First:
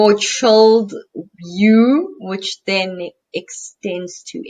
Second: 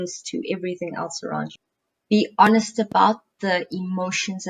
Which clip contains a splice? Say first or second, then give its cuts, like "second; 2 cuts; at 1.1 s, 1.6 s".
second; 1 cut; at 1.5 s